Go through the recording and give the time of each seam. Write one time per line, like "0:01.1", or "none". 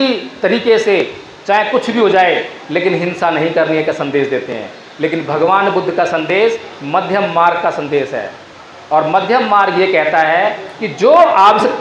none